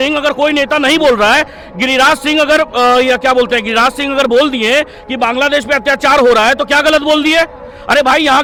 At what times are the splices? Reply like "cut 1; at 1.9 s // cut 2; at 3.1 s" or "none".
none